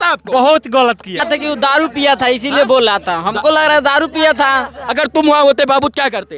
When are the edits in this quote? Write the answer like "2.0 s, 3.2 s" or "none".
1.2 s, 4.8 s